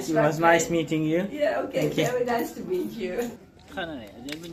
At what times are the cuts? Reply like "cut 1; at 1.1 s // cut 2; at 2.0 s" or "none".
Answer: cut 1; at 3.4 s